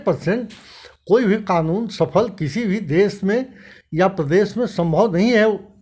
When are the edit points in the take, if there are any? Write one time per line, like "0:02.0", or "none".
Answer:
none